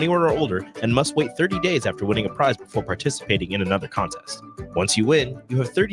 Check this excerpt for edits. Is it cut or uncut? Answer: uncut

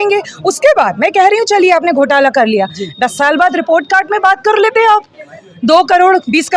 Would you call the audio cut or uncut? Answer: uncut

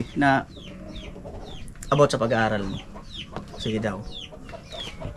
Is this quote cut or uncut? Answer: uncut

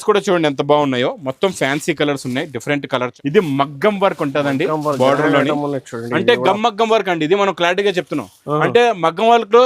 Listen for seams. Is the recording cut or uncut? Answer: cut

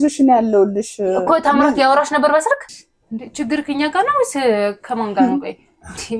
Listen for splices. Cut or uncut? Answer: cut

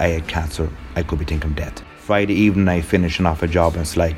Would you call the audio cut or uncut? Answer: cut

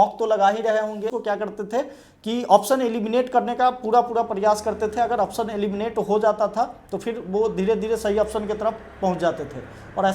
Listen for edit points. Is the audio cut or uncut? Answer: cut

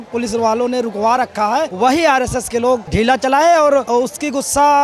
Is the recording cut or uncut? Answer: uncut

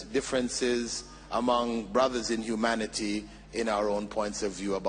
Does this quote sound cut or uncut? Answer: uncut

